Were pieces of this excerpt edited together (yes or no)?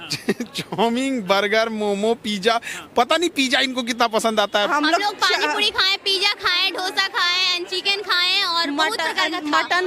yes